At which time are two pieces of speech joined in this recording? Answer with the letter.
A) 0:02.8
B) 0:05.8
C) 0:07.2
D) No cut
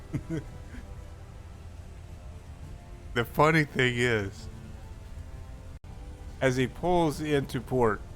B